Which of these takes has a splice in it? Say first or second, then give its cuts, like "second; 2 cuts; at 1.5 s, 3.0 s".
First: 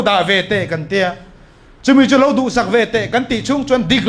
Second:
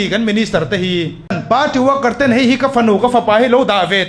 second; 1 cut; at 1.4 s